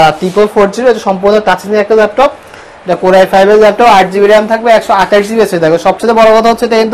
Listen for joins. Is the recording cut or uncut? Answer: uncut